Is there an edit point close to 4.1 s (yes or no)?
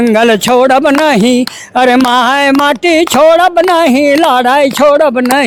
no